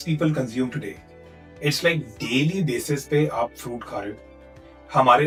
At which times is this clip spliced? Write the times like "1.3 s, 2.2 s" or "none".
none